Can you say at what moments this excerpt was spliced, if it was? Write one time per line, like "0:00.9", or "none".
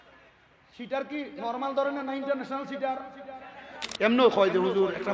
0:03.8